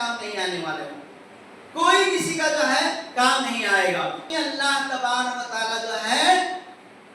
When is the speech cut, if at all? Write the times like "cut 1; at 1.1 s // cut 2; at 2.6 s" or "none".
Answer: cut 1; at 4.3 s